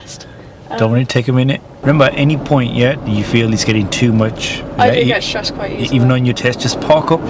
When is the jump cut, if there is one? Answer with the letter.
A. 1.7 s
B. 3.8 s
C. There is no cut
A